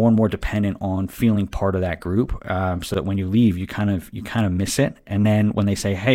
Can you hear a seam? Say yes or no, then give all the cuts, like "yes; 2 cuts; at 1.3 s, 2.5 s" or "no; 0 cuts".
no; 0 cuts